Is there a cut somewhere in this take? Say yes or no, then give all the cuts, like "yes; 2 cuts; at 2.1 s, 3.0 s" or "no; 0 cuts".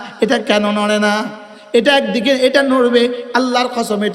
no; 0 cuts